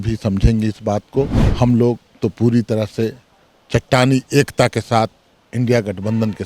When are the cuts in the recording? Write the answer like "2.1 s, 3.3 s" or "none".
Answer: 1.4 s